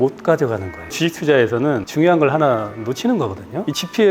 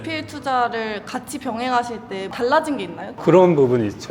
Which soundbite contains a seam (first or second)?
second